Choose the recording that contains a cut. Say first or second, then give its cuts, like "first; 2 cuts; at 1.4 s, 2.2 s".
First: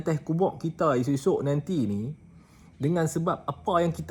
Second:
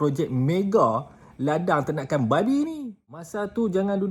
second; 1 cut; at 2.9 s